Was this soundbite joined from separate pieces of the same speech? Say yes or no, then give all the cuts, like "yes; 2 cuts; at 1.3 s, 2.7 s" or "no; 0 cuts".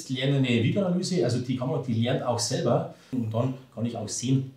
yes; 1 cut; at 3.1 s